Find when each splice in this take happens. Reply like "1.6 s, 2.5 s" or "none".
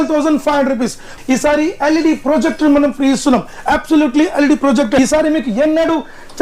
1.2 s, 5.0 s